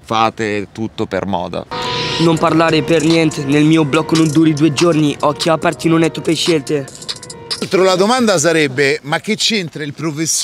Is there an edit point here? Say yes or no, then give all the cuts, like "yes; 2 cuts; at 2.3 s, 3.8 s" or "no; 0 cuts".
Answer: yes; 2 cuts; at 1.7 s, 7.7 s